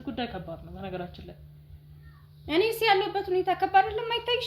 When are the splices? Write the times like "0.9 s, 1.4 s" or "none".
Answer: none